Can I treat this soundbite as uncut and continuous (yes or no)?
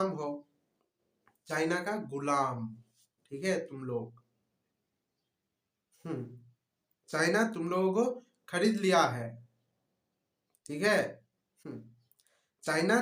yes